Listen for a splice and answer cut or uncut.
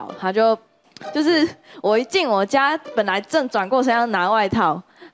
uncut